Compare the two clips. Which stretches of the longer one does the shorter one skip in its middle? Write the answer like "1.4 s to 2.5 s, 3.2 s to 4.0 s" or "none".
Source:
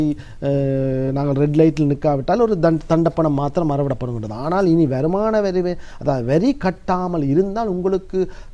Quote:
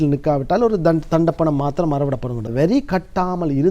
4.3 s to 6.2 s

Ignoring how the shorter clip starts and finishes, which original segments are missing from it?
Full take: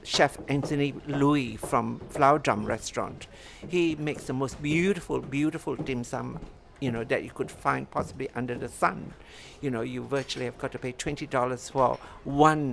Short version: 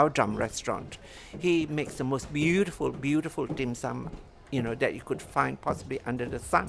none

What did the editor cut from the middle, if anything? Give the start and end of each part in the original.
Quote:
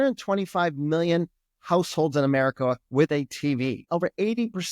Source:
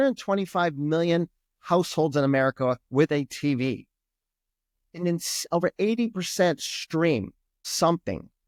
3.8 s to 5.4 s

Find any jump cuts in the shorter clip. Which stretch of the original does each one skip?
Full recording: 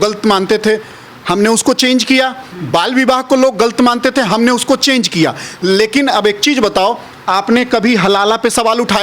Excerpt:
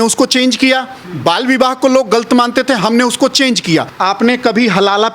5.4 s to 7.2 s

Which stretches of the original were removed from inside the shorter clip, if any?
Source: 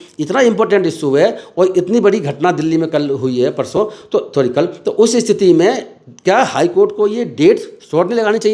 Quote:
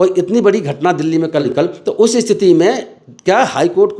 3.1 s to 4.5 s

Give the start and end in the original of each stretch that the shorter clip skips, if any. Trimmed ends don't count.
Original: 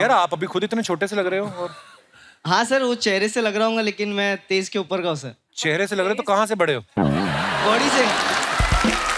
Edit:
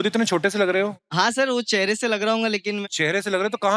1.5 s to 2.3 s, 4.2 s to 5.5 s

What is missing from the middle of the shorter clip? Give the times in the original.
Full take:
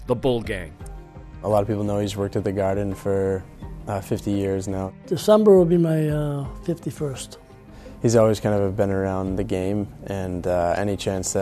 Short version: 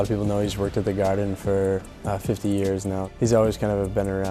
3.5 s to 3.8 s, 4.9 s to 7.9 s

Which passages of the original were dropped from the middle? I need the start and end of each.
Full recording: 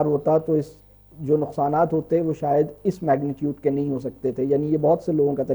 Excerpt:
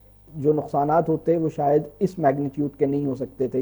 none

